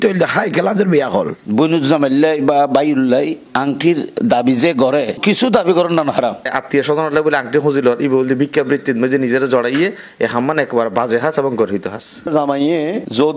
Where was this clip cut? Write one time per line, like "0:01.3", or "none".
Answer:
0:01.4
0:06.5
0:12.3